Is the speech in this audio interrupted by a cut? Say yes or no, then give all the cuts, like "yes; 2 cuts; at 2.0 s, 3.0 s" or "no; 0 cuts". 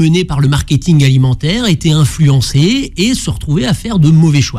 no; 0 cuts